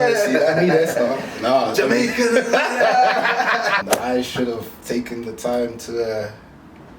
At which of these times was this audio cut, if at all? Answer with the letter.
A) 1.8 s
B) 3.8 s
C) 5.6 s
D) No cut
B